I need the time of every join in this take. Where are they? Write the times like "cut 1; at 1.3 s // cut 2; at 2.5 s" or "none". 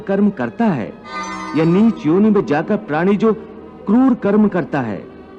cut 1; at 1.4 s